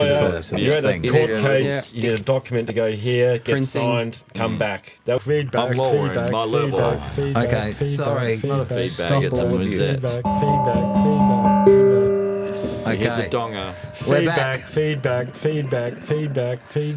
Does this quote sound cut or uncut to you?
cut